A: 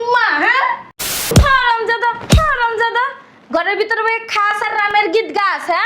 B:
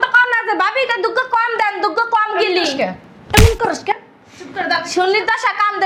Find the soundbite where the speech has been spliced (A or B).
A